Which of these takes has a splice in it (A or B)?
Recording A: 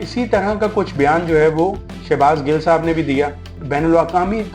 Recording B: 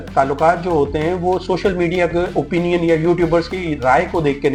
A